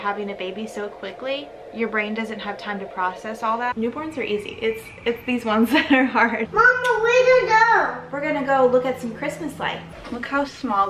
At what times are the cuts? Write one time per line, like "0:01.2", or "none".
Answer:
0:01.6
0:03.7
0:06.4
0:09.9